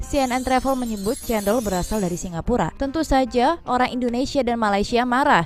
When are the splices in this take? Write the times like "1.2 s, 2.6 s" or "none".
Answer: none

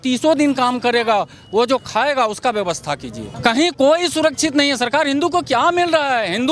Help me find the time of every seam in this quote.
3.3 s

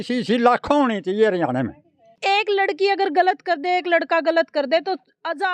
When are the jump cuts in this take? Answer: 2.1 s

